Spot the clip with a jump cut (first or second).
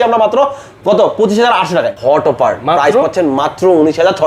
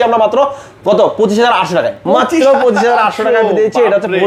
first